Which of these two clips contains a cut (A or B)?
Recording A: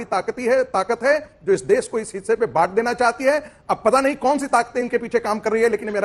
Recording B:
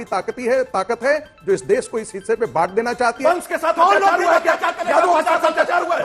B